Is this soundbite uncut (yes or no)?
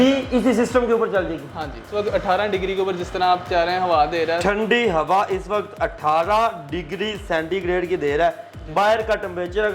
no